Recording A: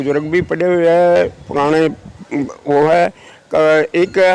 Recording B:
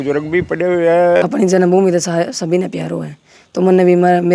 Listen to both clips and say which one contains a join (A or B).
B